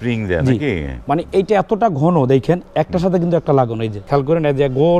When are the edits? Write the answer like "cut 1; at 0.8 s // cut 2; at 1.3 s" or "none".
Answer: cut 1; at 4.0 s